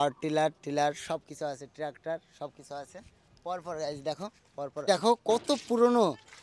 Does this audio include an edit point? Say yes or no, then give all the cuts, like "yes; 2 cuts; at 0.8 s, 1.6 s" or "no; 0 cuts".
no; 0 cuts